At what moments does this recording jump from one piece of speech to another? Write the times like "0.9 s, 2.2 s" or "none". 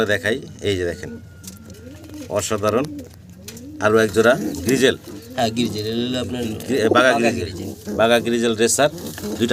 none